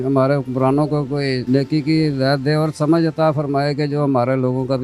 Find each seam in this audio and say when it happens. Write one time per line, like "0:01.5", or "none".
0:01.4